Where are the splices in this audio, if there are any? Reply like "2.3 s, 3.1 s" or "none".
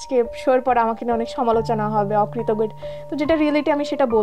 none

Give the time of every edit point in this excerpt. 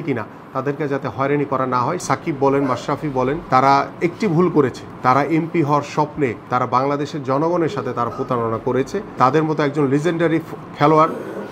2.0 s, 3.4 s, 4.9 s, 6.4 s, 9.1 s

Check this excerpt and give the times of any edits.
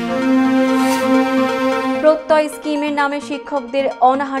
none

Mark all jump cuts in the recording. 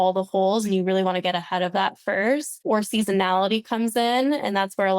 2.5 s

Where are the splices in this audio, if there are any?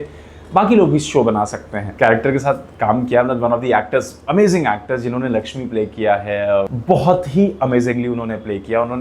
1.8 s, 6.7 s

